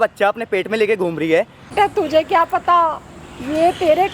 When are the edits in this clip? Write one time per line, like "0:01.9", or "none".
0:01.6